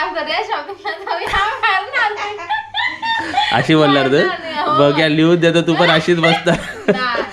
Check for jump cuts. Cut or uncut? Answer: uncut